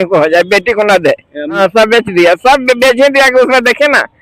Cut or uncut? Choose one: cut